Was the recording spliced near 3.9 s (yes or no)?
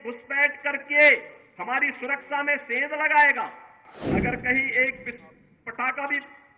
yes